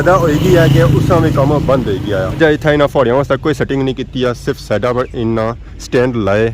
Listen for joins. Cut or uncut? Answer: cut